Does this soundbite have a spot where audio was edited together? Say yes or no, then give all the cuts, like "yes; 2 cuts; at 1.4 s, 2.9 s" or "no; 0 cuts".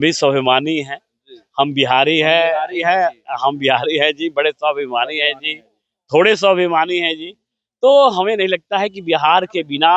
no; 0 cuts